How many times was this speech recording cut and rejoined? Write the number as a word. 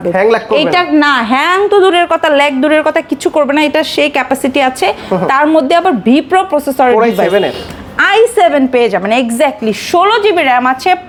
zero